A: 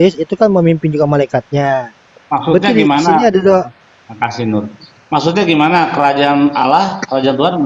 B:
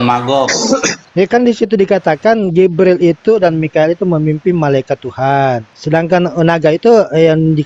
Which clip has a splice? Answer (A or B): B